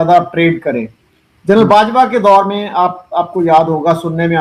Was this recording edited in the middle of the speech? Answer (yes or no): no